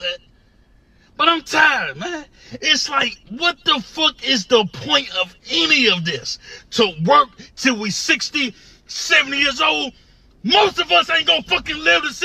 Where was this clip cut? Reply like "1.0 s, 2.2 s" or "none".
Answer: 1.9 s, 5.4 s

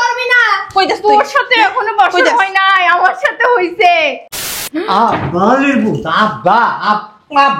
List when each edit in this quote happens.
4.6 s

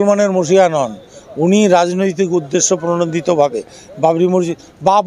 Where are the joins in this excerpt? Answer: none

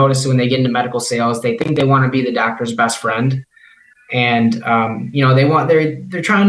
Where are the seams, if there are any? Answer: none

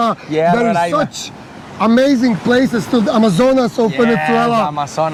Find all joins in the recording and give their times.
none

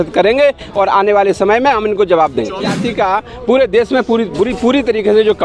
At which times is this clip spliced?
2.8 s

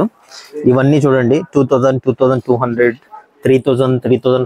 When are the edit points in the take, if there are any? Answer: none

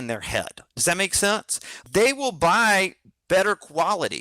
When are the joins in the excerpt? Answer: 1.8 s

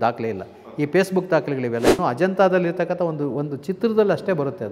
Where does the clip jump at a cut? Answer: 2.0 s

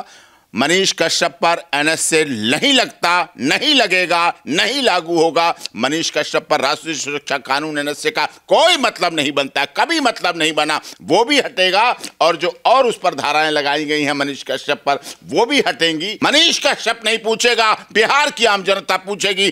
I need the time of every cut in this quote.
16.1 s

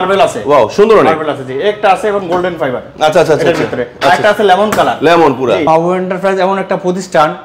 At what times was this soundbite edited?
5.7 s

